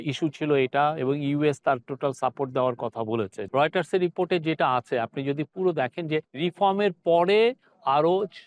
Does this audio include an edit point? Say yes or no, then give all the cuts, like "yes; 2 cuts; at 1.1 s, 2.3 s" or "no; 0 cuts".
yes; 2 cuts; at 3.4 s, 6.3 s